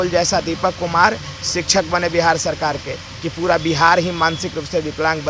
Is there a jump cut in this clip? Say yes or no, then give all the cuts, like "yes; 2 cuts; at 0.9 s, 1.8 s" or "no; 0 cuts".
no; 0 cuts